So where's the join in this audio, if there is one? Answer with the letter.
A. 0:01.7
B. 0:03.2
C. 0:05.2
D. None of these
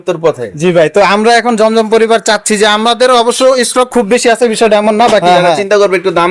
C